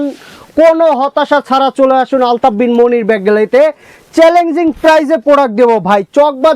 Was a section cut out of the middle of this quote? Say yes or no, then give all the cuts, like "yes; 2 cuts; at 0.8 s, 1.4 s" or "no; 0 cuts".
no; 0 cuts